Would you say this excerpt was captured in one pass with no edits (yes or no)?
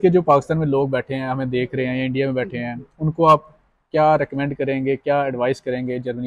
yes